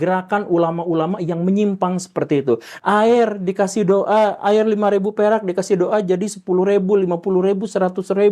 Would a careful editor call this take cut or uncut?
cut